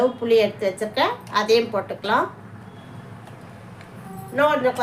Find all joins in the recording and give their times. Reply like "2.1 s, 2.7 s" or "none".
2.7 s, 4.0 s